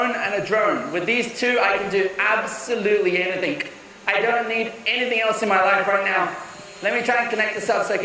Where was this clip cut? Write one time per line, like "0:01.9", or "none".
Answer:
none

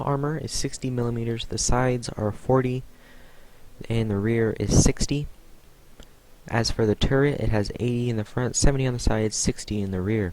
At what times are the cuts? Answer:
0:09.3

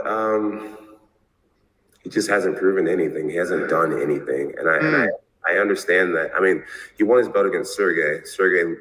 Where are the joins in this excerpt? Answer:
0:03.6
0:05.0

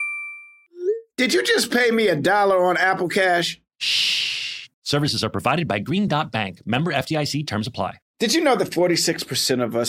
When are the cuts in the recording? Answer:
0:08.0

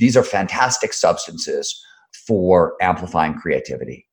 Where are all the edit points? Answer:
0:02.1

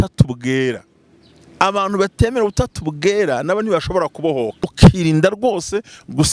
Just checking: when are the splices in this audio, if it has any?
0:04.7

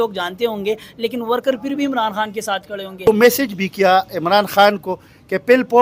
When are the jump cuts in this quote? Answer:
0:03.1

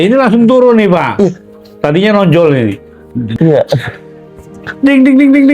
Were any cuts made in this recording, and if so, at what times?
0:03.3

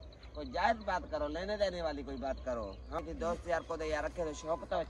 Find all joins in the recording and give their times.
0:02.9

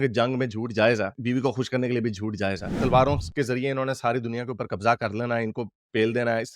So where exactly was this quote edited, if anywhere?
0:02.8

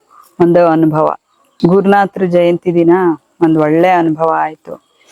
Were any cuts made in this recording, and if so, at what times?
none

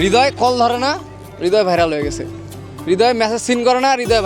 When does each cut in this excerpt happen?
none

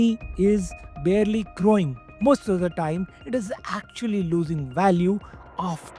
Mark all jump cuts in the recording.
none

